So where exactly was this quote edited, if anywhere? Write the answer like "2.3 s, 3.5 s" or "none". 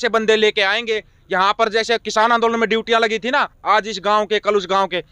none